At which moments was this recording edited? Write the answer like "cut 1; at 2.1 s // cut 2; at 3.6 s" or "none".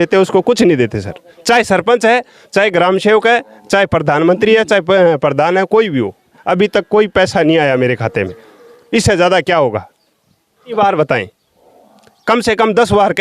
cut 1; at 6.4 s // cut 2; at 10.7 s